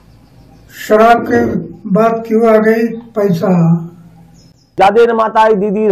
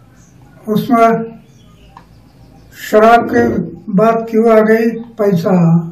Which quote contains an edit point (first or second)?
first